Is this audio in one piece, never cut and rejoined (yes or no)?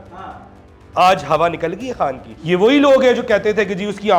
no